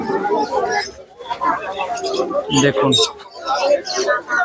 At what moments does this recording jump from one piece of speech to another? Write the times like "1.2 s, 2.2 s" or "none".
none